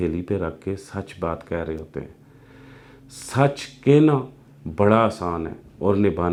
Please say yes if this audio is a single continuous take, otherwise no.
yes